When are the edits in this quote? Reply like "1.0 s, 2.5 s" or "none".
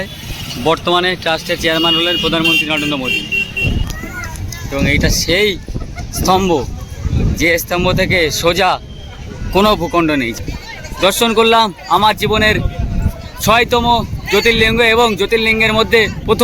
3.8 s, 10.3 s